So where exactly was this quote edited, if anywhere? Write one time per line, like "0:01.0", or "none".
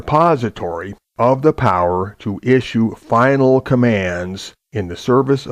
0:02.3